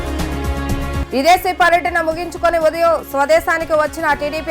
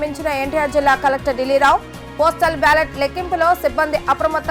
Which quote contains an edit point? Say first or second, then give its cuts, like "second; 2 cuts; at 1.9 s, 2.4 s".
first; 1 cut; at 1.0 s